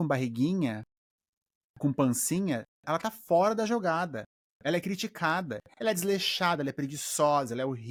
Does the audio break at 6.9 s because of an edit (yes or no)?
no